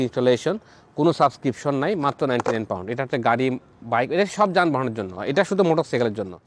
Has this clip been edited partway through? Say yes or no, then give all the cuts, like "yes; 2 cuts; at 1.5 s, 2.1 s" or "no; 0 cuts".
no; 0 cuts